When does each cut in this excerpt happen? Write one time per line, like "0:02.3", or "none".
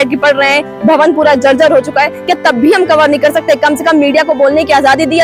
none